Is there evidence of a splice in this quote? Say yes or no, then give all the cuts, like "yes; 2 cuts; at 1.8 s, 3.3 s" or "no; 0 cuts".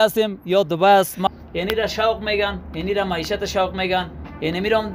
yes; 1 cut; at 1.3 s